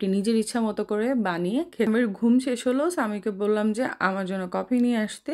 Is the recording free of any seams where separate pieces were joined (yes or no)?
no